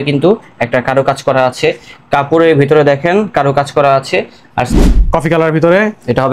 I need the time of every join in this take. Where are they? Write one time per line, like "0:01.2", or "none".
0:04.7